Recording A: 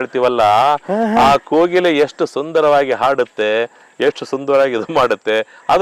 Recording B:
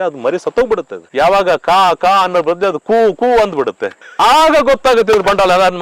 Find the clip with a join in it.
B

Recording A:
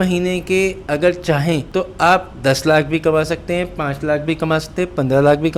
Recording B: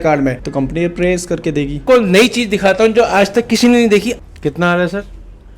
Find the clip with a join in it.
B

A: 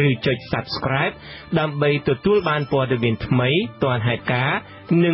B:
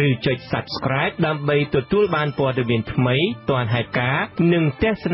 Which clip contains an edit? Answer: B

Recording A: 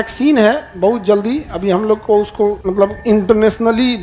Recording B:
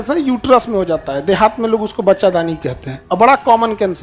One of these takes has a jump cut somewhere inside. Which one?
A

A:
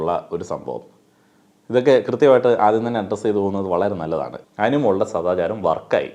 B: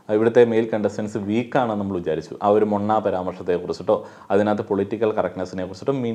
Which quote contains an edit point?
A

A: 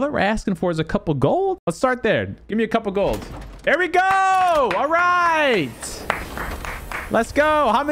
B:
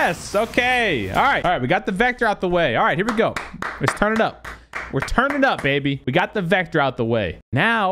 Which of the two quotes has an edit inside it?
B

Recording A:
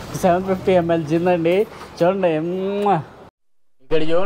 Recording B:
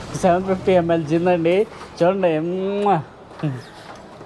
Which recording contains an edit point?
A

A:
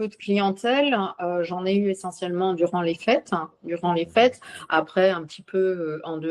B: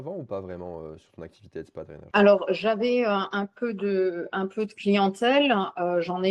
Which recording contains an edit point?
B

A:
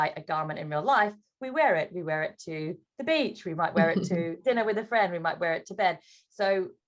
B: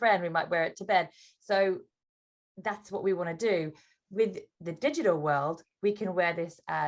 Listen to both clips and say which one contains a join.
B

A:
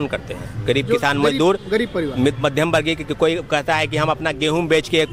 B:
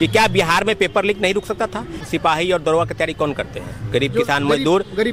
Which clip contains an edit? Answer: B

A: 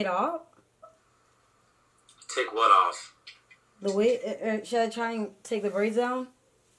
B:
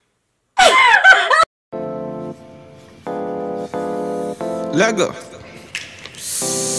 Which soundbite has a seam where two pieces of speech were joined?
B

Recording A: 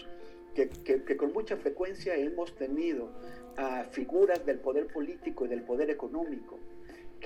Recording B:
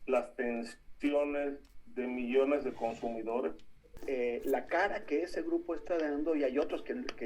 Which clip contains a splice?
B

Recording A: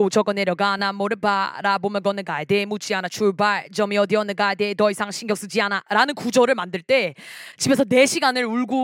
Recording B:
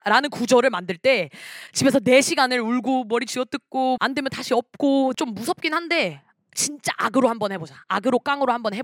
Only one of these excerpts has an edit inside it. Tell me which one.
B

